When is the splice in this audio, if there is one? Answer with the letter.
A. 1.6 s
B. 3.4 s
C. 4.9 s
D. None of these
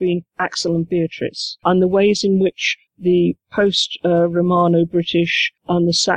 A